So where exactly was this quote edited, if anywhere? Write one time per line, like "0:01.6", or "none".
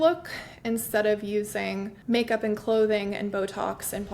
0:01.9